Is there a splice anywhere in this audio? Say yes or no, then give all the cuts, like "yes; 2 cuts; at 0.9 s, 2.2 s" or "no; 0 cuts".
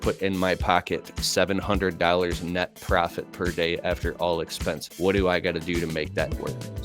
yes; 1 cut; at 4.9 s